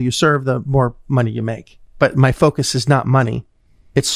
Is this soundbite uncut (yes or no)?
yes